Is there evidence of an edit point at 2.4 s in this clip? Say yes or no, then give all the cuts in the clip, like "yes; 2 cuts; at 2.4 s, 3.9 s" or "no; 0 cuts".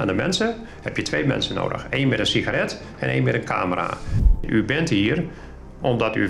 no; 1 cut; at 4.2 s